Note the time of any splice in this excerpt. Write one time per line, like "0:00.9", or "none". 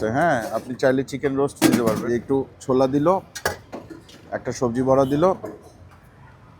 0:02.0